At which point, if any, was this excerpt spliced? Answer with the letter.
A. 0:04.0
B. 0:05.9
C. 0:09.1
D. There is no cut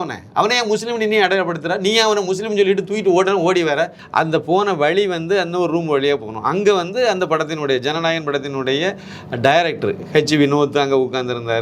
A